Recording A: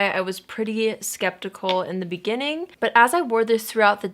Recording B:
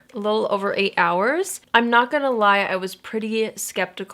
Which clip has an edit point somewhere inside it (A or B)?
B